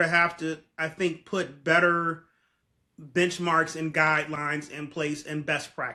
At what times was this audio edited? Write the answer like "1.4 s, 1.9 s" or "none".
none